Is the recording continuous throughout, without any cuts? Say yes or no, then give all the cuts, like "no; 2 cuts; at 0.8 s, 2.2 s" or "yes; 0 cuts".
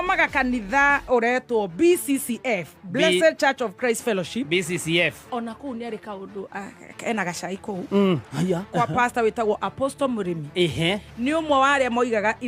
yes; 0 cuts